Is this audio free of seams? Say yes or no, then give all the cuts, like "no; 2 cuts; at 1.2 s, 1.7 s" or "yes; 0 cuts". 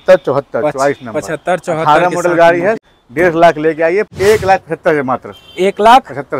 no; 2 cuts; at 2.8 s, 4.1 s